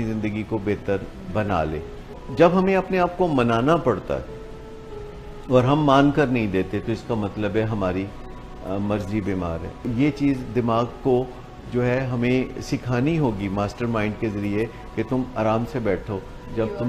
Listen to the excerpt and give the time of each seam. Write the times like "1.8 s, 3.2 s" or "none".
2.2 s, 9.8 s

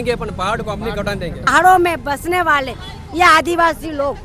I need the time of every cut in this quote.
1.5 s

